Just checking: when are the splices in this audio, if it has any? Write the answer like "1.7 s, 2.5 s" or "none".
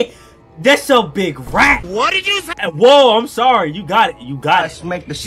none